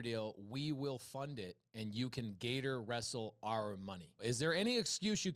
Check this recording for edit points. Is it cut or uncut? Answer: uncut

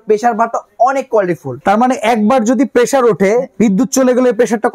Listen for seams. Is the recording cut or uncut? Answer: uncut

